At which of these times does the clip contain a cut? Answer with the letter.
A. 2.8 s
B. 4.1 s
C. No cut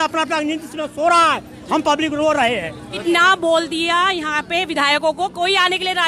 A